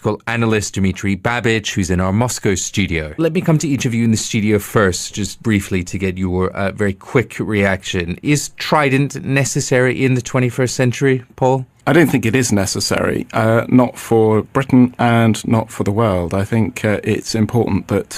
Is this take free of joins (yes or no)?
no